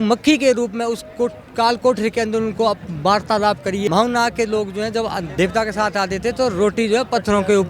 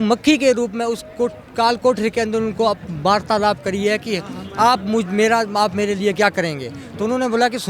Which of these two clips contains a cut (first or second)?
first